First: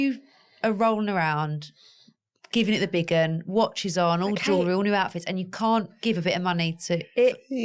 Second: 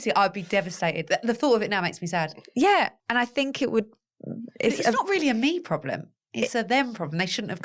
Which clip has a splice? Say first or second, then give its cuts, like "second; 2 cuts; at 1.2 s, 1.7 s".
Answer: second; 1 cut; at 3.0 s